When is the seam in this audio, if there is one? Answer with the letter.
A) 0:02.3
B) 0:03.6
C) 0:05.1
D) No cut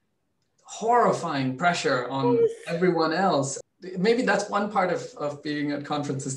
B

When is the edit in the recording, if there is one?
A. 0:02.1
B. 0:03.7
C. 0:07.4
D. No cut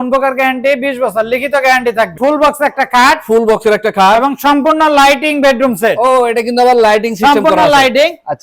A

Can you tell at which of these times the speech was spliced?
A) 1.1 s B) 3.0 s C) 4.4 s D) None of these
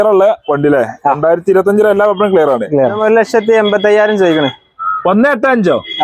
B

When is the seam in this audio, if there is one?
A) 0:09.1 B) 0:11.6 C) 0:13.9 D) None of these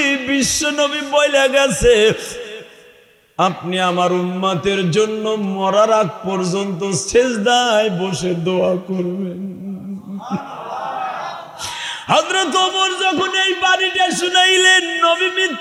D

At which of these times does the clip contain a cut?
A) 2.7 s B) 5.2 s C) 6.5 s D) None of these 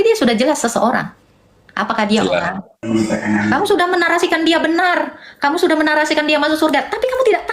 A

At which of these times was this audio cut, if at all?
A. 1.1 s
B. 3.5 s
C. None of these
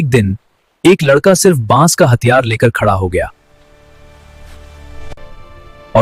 C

